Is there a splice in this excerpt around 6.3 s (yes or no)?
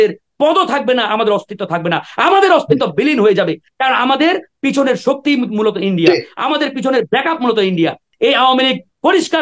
no